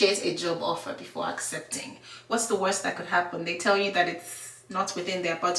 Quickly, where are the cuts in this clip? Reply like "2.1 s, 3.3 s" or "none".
none